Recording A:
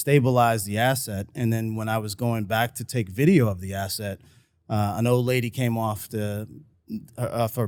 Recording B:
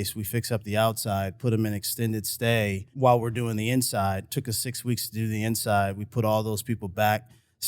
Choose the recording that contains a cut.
B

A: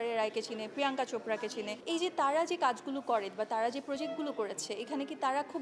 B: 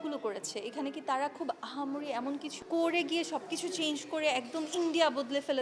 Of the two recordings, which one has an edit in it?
B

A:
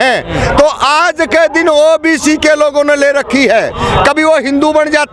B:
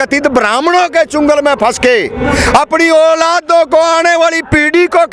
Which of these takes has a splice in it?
A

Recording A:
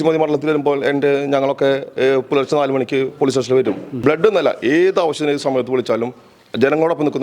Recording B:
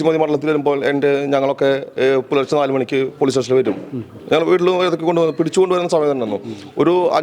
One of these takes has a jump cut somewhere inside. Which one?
A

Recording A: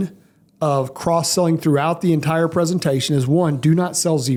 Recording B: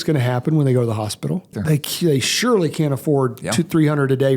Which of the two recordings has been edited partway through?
B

